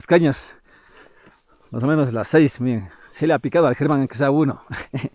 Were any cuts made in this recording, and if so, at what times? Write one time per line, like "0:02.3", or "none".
none